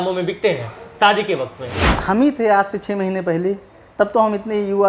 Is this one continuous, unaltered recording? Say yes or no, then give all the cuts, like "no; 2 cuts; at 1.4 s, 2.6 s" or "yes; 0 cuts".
no; 1 cut; at 1.9 s